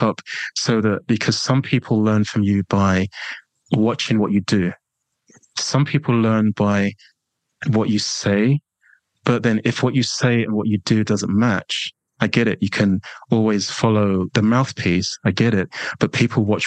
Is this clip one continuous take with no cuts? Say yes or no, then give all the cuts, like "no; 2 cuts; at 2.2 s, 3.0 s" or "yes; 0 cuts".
no; 1 cut; at 14.3 s